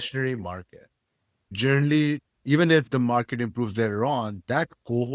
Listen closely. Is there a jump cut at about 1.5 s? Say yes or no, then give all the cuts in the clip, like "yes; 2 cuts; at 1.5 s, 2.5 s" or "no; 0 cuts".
yes; 1 cut; at 1.5 s